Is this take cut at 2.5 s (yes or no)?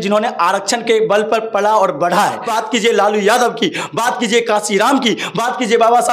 yes